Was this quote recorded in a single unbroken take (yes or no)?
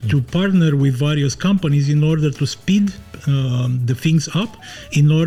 yes